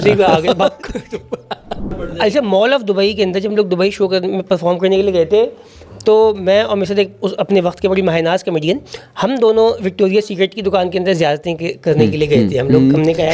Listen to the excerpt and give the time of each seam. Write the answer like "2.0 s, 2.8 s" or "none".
2.1 s